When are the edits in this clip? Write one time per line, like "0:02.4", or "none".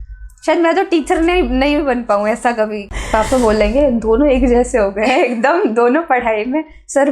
0:02.9